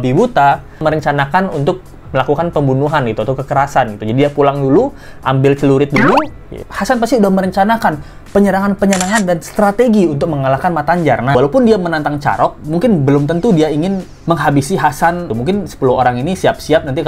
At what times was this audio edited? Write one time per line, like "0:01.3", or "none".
0:00.8
0:06.7
0:11.3
0:14.1
0:15.3

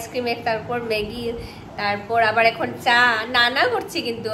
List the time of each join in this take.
none

